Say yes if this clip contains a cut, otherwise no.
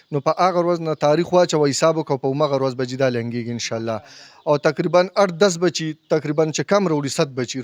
no